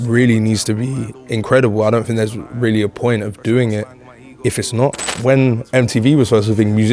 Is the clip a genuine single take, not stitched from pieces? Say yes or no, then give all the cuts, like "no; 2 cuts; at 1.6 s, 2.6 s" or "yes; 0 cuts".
no; 1 cut; at 5.1 s